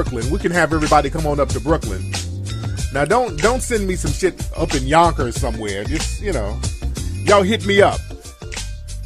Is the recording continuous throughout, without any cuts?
no; 1 cut; at 4.3 s

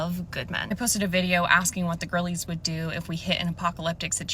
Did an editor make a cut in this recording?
yes; 1 cut; at 2.0 s

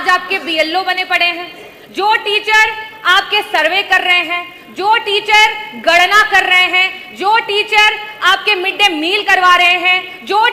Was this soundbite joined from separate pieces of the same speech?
no; 0 cuts

